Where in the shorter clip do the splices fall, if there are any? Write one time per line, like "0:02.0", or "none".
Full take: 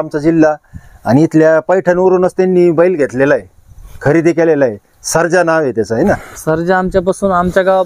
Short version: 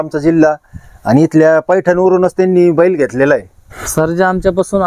0:03.8

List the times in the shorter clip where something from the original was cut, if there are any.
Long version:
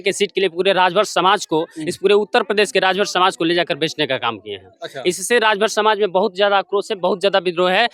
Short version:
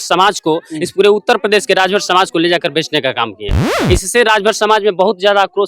0:03.7

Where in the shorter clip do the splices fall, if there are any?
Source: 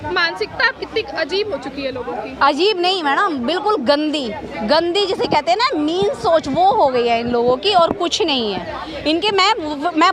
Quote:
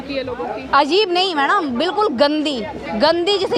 none

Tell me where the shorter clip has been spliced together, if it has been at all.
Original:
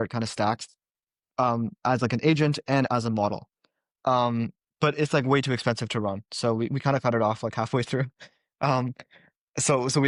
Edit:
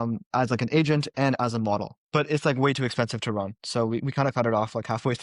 0:02.0

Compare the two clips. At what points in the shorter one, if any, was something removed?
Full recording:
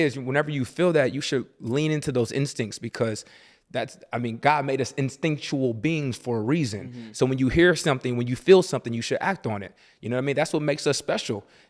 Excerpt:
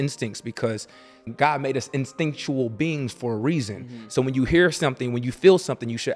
0:01.3

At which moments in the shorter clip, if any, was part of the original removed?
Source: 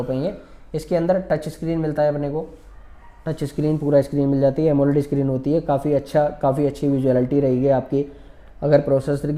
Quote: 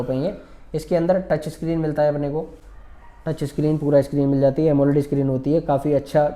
none

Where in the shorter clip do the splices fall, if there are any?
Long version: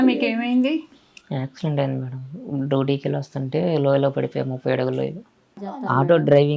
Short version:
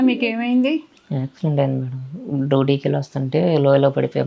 0:01.0

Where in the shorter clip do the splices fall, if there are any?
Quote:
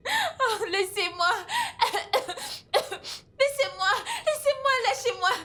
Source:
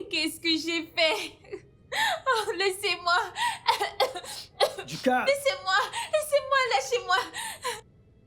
none

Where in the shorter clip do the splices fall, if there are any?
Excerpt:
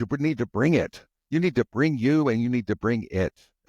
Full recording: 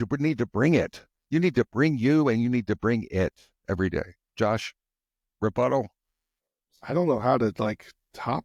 none

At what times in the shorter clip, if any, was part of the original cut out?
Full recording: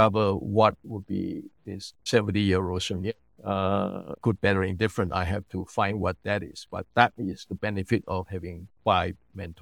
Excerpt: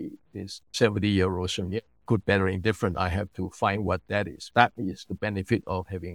0:01.9
0:04.4

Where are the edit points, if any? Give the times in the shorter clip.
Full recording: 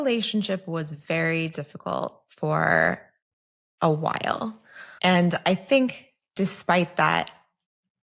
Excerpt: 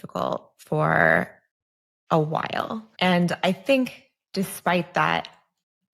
0:02.8

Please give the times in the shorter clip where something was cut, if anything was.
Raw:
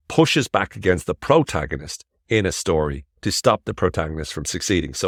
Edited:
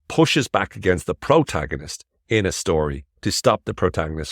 none

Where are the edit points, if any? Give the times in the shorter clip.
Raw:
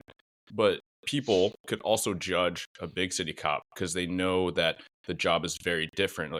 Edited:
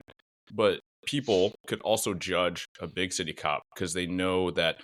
none

